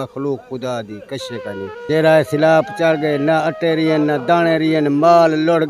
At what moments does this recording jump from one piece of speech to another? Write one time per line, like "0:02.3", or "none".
0:01.8